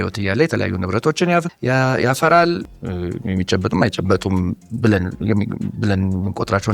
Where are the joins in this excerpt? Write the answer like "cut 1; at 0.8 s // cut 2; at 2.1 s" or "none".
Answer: cut 1; at 1.5 s // cut 2; at 2.6 s